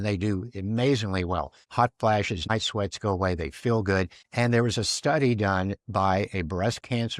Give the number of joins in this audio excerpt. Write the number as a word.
three